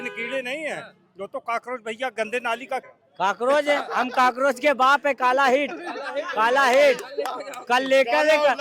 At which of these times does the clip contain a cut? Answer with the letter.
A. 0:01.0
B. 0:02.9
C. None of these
B